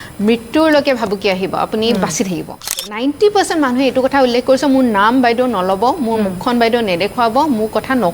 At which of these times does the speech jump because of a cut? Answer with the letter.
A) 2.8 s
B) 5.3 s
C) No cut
A